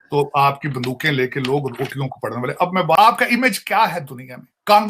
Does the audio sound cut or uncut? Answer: cut